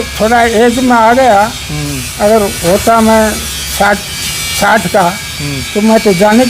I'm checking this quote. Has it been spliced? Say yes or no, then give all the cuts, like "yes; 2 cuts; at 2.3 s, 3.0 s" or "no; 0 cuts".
no; 0 cuts